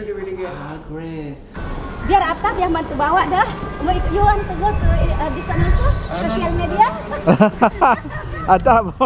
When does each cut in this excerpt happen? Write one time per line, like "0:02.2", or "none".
0:01.6